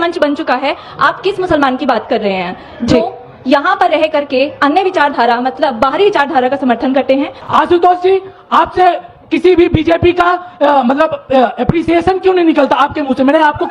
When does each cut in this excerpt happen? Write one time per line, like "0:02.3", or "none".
0:07.4